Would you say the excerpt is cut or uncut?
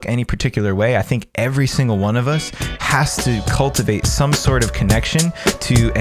uncut